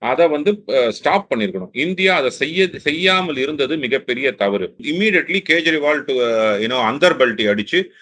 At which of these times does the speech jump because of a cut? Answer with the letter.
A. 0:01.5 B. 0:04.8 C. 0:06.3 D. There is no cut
B